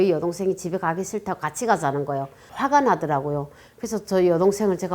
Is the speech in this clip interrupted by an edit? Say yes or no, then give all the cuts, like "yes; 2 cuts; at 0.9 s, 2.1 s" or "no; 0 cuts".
yes; 1 cut; at 2.4 s